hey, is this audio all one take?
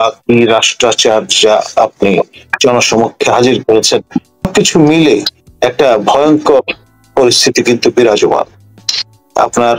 no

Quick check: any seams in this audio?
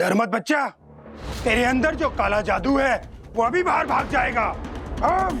no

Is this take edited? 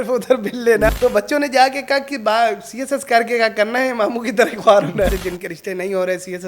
yes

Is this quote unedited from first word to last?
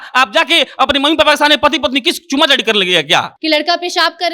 no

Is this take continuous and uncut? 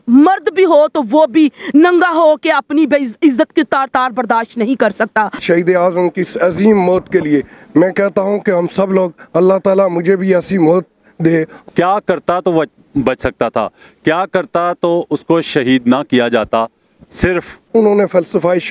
no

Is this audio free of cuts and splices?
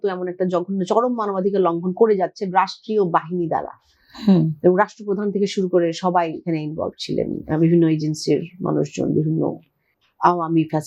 yes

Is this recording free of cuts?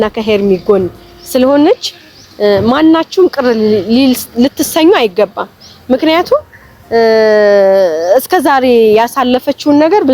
yes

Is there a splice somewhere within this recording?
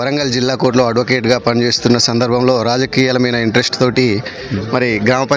no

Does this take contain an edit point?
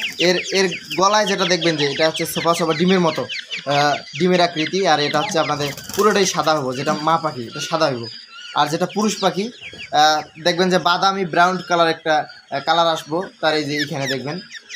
no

